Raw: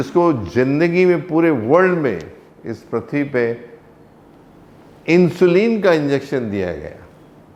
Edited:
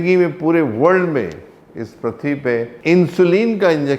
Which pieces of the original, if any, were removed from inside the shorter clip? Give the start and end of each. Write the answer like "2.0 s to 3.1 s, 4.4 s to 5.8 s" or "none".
3.6 s to 5.0 s

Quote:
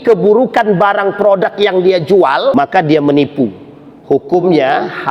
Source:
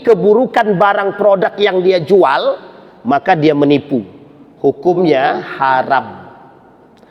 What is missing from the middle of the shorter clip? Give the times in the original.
2.5 s to 3.1 s

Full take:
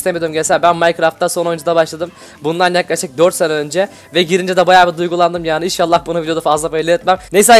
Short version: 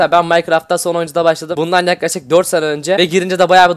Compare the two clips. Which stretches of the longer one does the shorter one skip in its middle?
2.0 s to 2.3 s, 3.8 s to 4.1 s

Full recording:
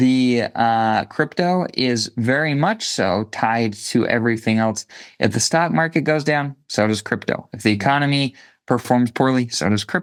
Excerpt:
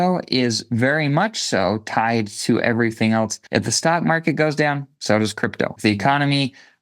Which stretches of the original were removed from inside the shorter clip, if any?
4.8 s to 5.1 s, 7.4 s to 7.5 s

